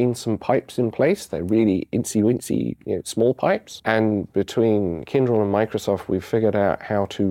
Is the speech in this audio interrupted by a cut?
no; 0 cuts

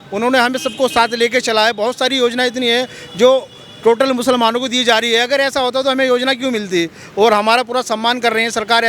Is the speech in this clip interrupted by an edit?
no; 0 cuts

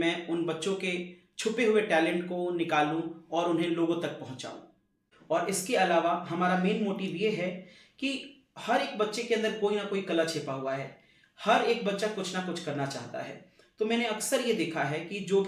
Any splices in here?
yes; 1 cut; at 5.0 s

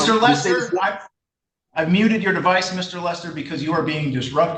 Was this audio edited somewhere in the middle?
no; 0 cuts

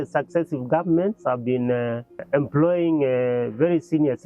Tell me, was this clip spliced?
yes; 1 cut; at 2.2 s

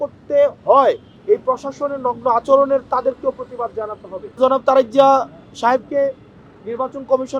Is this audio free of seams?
no; 2 cuts; at 1.1 s, 4.4 s

